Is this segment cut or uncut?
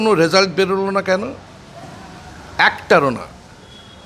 uncut